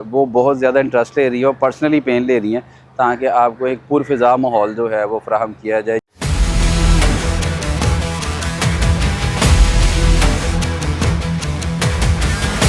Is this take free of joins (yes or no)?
yes